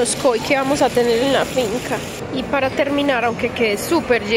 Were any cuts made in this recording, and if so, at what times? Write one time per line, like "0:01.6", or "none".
0:02.2